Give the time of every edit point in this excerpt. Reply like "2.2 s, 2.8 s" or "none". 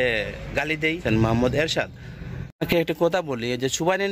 1.0 s, 2.6 s